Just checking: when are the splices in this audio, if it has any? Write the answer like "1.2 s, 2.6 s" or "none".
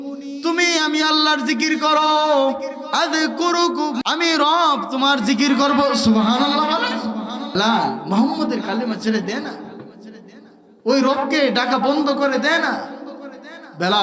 4.0 s, 7.5 s